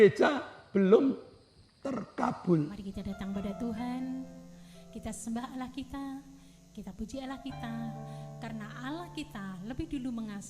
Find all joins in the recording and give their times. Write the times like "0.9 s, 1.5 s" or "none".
2.8 s